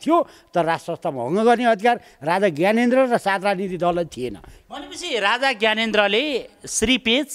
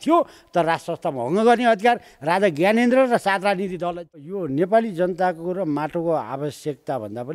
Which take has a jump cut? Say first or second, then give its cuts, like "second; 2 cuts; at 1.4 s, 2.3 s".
second; 1 cut; at 4.3 s